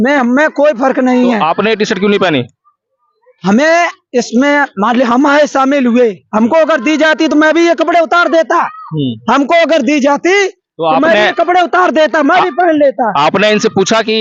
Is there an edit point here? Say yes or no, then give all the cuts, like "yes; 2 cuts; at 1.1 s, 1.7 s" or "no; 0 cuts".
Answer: no; 0 cuts